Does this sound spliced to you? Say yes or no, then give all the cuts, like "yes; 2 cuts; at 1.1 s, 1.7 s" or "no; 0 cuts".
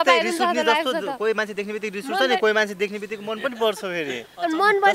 no; 0 cuts